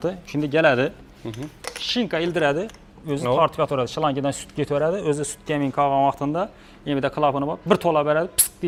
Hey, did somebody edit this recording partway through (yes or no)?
no